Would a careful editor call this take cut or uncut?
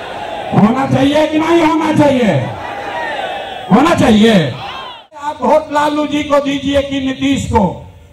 cut